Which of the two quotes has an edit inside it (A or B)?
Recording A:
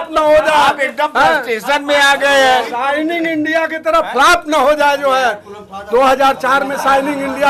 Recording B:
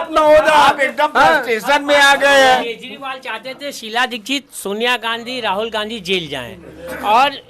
B